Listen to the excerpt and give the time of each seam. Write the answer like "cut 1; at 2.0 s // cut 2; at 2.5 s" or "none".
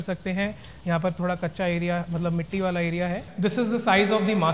cut 1; at 3.2 s